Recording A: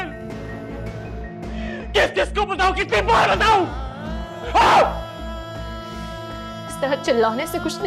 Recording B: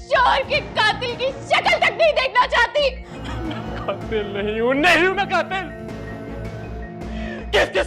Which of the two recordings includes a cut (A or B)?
B